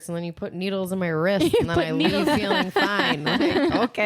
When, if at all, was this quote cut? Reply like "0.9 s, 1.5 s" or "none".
none